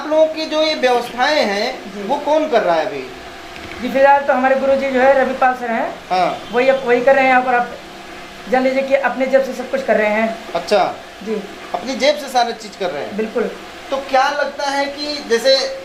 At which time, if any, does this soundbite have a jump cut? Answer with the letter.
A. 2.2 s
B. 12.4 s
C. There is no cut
C